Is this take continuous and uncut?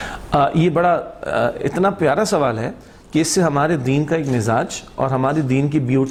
yes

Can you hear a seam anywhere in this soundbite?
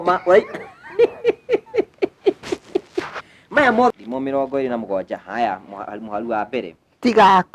yes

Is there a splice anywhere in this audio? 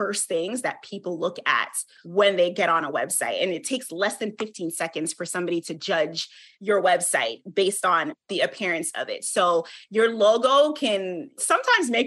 no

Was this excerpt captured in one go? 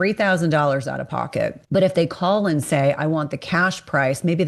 no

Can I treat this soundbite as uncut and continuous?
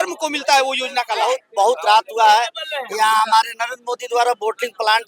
no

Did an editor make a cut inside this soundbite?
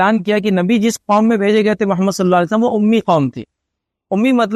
no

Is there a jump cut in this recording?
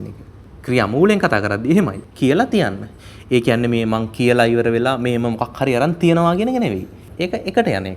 yes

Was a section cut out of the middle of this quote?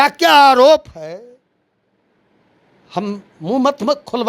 no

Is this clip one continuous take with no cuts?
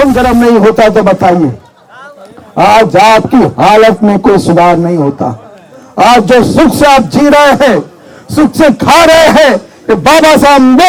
yes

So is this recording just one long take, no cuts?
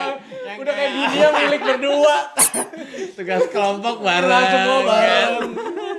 yes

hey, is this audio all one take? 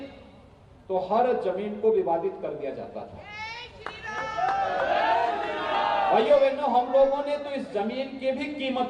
yes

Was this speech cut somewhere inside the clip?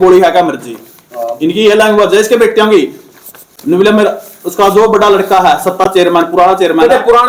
no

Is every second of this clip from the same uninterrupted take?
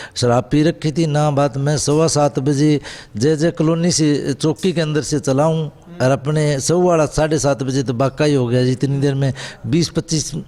yes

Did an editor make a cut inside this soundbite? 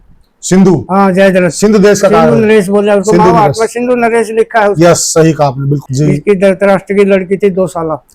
yes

